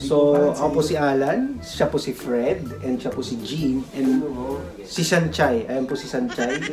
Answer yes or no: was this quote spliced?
no